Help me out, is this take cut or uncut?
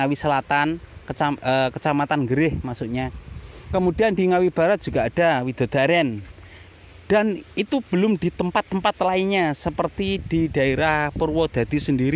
uncut